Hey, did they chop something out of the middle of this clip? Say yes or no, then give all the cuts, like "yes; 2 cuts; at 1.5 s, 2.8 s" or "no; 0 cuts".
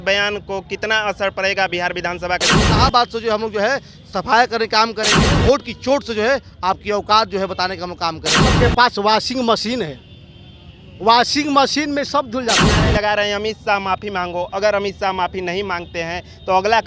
yes; 4 cuts; at 2.7 s, 5.1 s, 8.6 s, 12.8 s